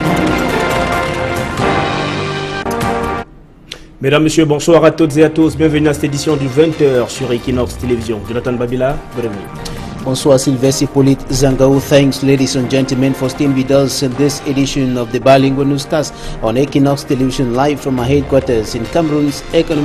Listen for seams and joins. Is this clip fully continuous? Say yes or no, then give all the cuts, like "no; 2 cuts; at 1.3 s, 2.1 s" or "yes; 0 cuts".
no; 1 cut; at 3.1 s